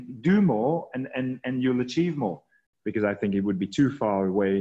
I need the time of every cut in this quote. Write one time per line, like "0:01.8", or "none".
0:02.6